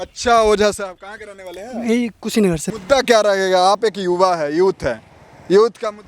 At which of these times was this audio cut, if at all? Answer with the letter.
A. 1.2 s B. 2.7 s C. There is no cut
B